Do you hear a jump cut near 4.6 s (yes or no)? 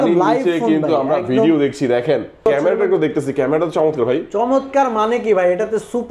no